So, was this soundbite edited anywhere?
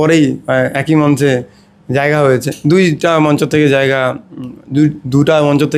no; 0 cuts

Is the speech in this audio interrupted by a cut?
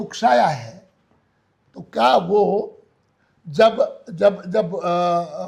no; 0 cuts

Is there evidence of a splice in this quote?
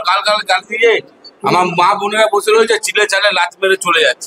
no; 0 cuts

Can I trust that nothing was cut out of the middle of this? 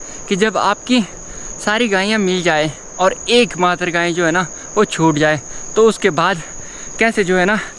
yes; 0 cuts

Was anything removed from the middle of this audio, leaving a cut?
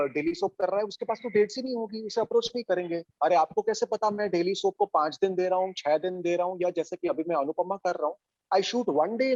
no; 0 cuts

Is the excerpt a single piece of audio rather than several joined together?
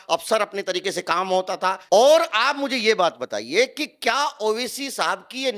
no; 1 cut; at 1.8 s

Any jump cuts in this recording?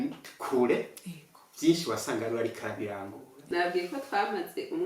yes; 1 cut; at 3.5 s

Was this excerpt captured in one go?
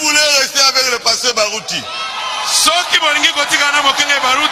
yes; 0 cuts

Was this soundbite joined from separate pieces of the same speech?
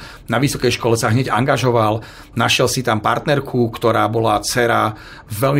no; 0 cuts

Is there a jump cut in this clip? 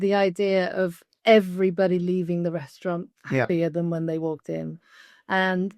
yes; 1 cut; at 1.1 s

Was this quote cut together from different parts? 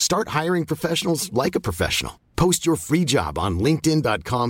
no; 0 cuts

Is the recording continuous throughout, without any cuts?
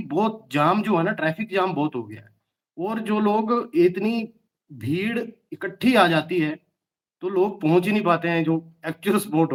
yes; 0 cuts

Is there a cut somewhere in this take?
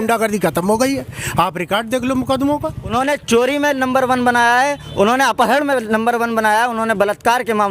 yes; 1 cut; at 2.9 s

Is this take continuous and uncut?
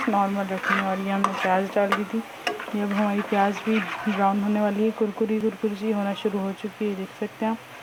yes; 0 cuts

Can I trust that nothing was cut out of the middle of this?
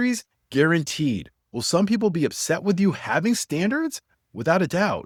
yes; 0 cuts

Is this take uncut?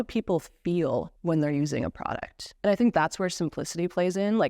no; 1 cut; at 2.5 s

